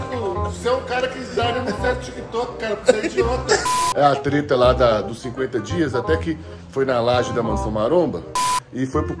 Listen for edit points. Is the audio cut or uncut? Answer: cut